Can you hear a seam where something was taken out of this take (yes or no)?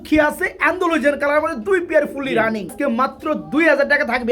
yes